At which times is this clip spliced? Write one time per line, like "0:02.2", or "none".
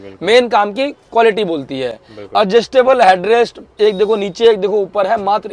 none